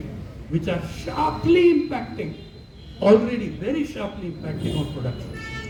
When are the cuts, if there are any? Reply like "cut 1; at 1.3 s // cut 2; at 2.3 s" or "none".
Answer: none